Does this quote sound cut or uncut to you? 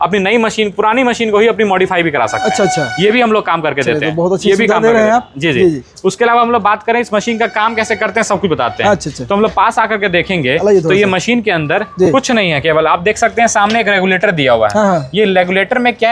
uncut